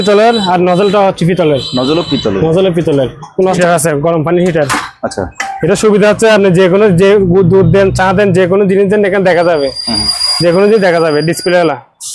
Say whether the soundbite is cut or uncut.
cut